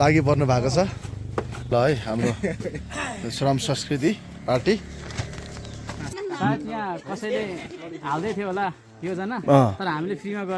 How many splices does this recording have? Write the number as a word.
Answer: two